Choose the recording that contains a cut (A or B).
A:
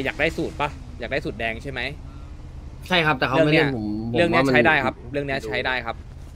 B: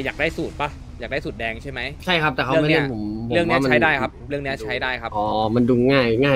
B